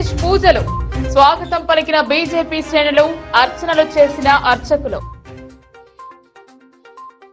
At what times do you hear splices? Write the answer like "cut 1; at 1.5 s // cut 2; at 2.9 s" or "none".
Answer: none

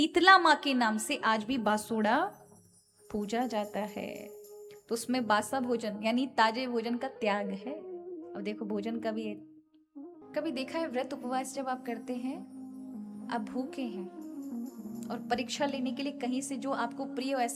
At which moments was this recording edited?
cut 1; at 10.1 s

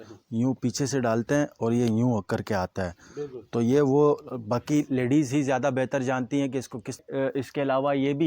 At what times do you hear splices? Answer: cut 1; at 7.0 s

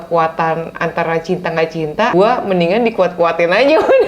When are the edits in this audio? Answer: cut 1; at 2.1 s

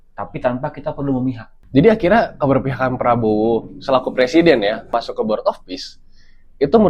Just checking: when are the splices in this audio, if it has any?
cut 1; at 1.5 s // cut 2; at 4.9 s

